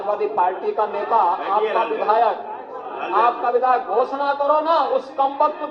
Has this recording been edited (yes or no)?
no